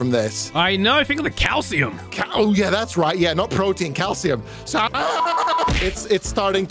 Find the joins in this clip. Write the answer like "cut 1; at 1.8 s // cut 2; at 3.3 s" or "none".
cut 1; at 5.7 s